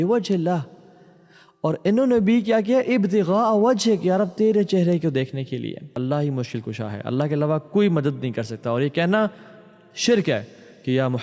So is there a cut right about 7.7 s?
no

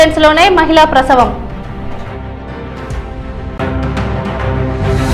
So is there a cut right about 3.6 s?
yes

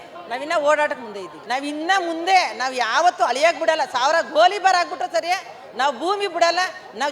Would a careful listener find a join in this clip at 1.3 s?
yes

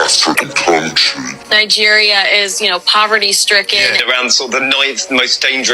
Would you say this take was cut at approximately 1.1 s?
no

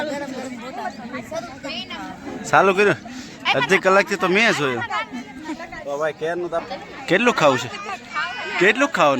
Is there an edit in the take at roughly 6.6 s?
yes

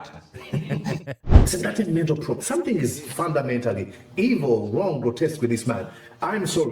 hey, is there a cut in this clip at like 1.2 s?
yes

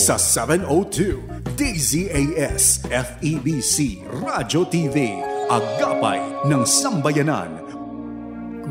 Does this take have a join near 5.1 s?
no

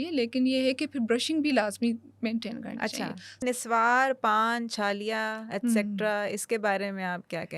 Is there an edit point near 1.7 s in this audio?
no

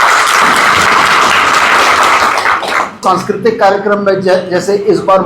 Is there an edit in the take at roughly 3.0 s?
yes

